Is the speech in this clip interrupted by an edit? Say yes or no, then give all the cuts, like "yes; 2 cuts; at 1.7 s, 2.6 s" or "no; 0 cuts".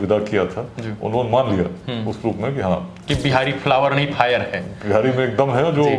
no; 0 cuts